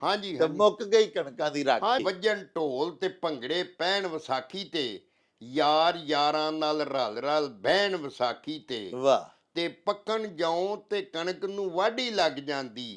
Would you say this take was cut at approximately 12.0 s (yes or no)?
no